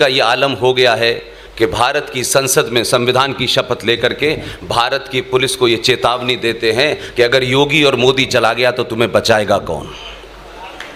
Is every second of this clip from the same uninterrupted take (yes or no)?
yes